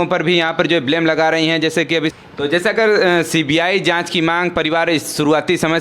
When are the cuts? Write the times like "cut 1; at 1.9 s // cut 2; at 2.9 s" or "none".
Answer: cut 1; at 2.1 s